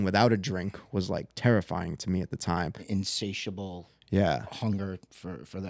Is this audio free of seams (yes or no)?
no